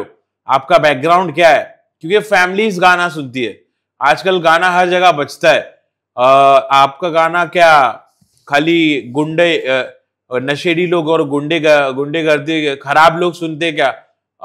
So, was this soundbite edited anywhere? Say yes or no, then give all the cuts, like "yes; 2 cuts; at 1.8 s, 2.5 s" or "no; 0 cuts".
no; 0 cuts